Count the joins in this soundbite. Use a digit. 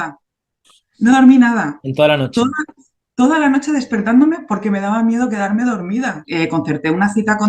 1